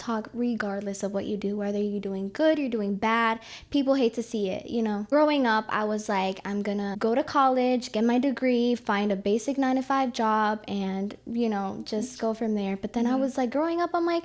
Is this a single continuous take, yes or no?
no